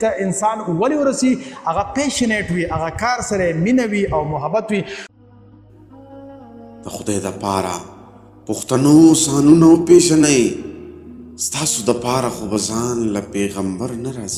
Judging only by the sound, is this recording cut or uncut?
cut